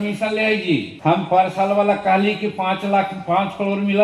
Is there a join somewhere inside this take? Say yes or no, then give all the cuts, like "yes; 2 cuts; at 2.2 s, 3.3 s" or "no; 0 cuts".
yes; 1 cut; at 0.9 s